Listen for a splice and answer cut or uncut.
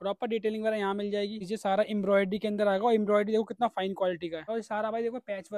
cut